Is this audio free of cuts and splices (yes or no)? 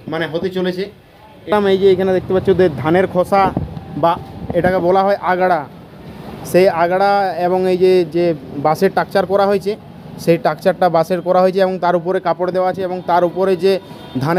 no